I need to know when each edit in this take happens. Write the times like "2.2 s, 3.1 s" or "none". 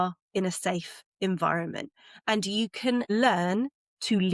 3.1 s